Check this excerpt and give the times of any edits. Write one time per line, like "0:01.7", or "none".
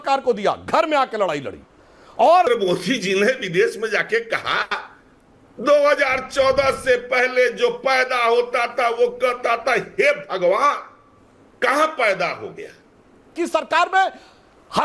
0:02.5
0:13.3